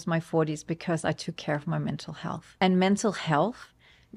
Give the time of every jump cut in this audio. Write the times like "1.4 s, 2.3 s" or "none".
2.6 s